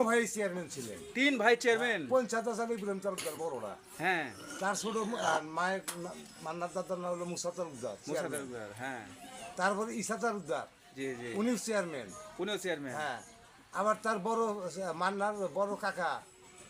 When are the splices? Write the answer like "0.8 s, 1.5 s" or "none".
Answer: none